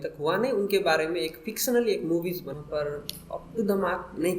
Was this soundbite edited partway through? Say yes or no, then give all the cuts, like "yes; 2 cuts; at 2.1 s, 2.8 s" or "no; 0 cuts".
yes; 1 cut; at 2.5 s